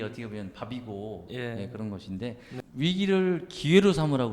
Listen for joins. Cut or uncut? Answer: cut